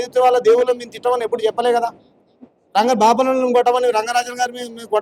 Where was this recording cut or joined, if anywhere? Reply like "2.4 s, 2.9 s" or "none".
none